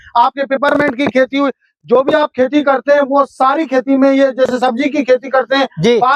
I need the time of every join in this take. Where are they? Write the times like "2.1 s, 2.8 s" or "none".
none